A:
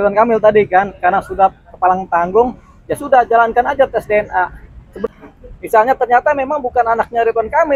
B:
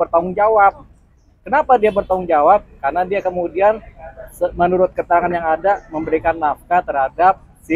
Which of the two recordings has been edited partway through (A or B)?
A